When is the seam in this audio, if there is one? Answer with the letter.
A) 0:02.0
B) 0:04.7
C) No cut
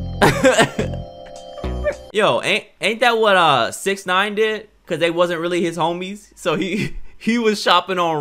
A